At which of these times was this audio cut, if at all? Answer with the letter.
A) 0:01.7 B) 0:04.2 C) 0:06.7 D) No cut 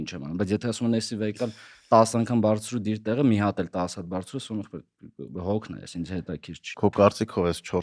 C